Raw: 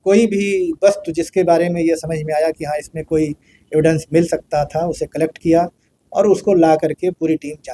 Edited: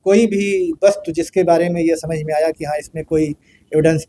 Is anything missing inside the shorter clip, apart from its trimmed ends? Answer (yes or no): no